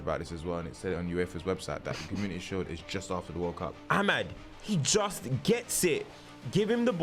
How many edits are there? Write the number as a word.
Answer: one